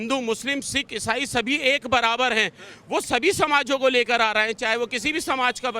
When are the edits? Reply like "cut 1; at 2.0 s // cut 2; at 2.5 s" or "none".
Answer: none